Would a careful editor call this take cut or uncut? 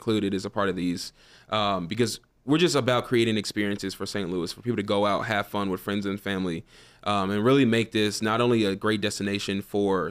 uncut